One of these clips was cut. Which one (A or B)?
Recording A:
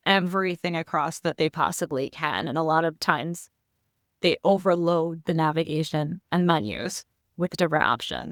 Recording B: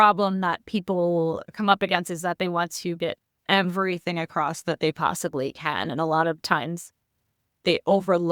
B